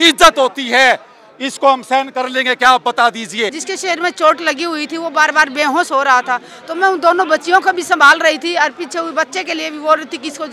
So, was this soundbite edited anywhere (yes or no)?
yes